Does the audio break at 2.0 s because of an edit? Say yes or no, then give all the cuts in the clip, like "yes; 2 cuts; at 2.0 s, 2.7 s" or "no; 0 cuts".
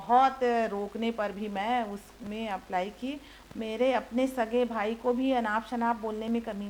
no; 1 cut; at 3.3 s